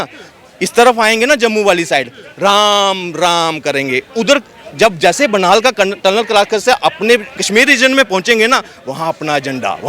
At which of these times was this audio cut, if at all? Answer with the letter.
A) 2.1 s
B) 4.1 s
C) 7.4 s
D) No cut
C